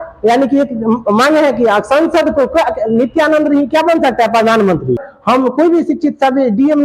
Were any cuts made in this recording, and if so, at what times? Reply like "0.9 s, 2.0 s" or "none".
5.1 s